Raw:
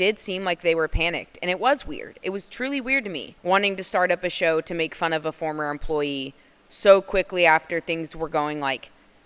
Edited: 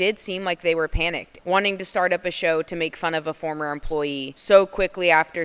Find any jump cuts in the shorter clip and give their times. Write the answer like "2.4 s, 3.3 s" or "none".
1.3 s, 4.3 s